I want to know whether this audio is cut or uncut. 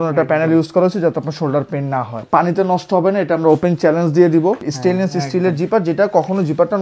cut